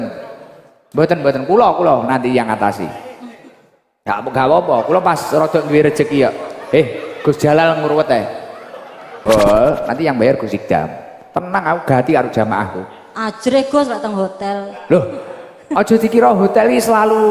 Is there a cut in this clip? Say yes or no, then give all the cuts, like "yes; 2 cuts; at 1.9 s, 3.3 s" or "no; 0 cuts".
yes; 1 cut; at 9.2 s